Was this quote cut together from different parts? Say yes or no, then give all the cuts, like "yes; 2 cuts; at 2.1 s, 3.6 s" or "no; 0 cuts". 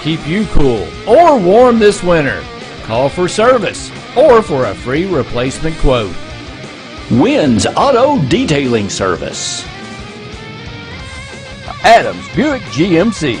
no; 0 cuts